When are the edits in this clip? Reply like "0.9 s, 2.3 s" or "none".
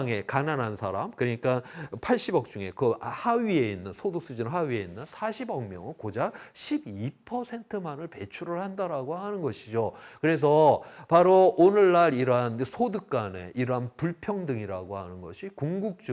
none

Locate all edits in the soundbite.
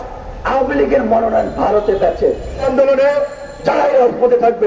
2.6 s

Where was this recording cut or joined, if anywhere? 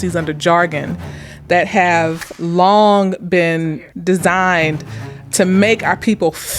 2.3 s, 3.7 s, 5.2 s

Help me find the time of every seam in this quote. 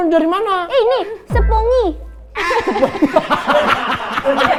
none

